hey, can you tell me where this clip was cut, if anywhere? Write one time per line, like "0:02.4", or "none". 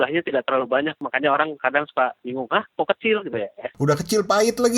0:01.0
0:03.7

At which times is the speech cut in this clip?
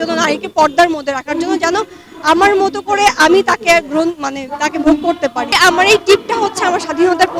0:05.5

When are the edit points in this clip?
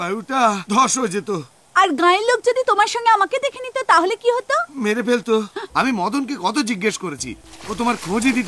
0:05.6

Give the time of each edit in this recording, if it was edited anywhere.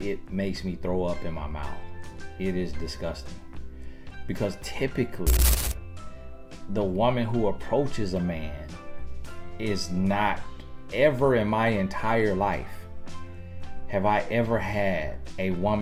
none

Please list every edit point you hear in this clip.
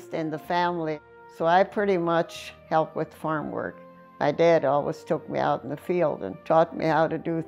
0:01.0
0:02.5

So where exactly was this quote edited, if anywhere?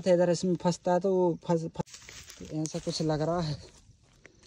0:01.7

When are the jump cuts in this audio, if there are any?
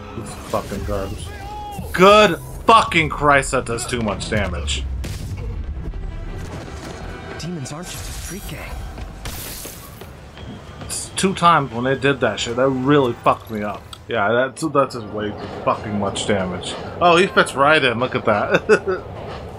none

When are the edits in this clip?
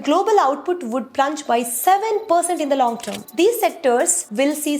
0:03.1

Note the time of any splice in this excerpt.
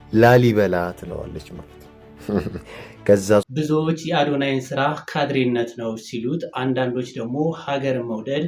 0:03.5

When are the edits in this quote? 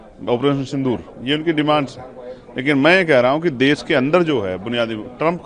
none

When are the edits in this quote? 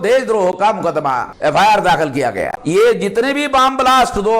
0:01.3
0:02.6

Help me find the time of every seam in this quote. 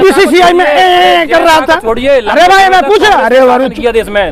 none

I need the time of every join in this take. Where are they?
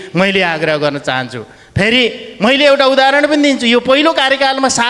none

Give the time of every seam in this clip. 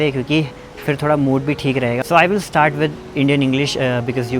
0:02.0

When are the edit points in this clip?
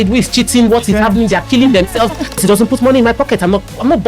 0:02.4

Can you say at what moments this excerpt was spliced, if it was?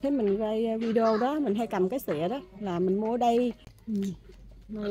0:03.7

